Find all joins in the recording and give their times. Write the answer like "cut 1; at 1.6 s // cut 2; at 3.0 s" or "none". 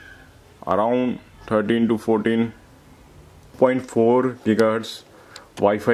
cut 1; at 3.5 s